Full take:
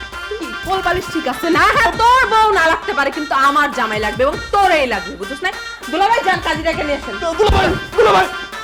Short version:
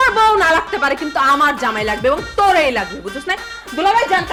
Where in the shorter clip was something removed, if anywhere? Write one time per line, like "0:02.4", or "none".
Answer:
none